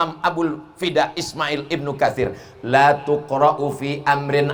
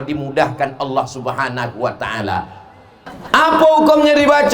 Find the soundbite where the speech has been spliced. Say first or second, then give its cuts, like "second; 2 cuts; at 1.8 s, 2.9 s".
second; 1 cut; at 3.1 s